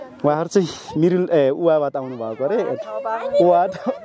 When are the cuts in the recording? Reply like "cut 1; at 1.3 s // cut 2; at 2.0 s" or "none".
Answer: none